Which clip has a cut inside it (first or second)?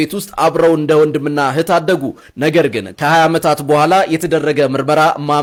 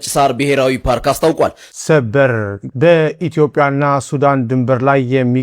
second